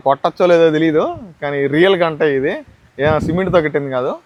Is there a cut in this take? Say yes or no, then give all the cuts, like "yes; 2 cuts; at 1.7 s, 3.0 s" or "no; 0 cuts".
no; 0 cuts